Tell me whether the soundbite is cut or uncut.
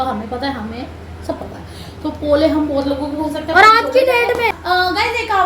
cut